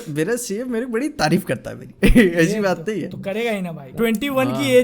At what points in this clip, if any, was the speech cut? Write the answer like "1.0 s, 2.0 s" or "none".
3.9 s